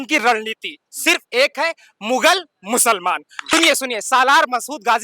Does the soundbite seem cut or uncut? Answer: cut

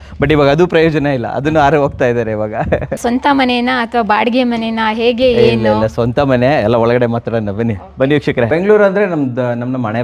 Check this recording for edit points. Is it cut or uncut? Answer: cut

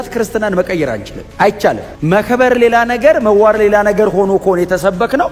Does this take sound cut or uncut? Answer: uncut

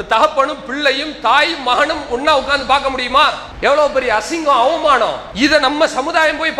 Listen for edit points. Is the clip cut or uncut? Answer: cut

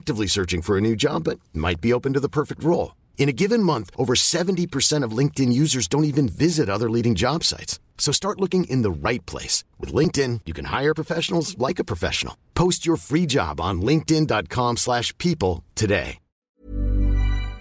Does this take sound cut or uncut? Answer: cut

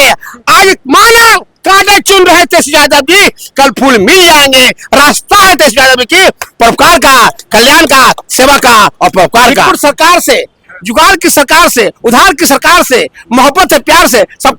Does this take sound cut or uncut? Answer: cut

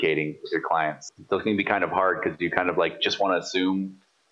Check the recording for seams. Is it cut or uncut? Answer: cut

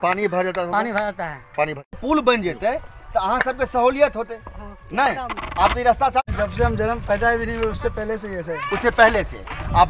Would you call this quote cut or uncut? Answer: cut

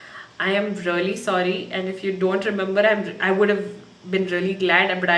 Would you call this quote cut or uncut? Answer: uncut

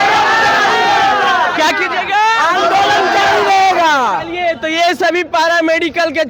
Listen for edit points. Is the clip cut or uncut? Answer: uncut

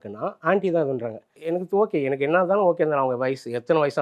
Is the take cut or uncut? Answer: cut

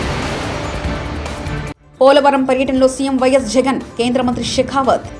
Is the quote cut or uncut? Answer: cut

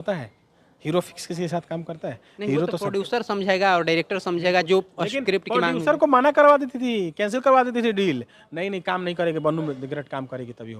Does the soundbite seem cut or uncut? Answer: uncut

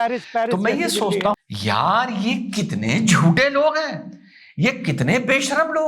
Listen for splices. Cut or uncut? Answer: cut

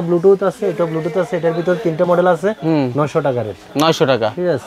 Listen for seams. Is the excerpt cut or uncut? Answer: uncut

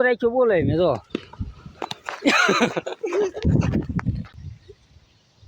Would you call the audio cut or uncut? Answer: cut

